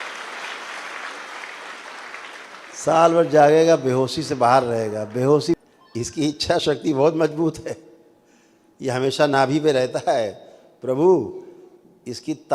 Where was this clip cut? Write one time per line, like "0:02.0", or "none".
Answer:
0:05.5